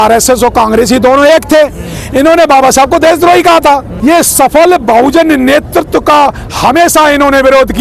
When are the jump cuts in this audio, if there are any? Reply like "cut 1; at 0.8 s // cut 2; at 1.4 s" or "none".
cut 1; at 3.9 s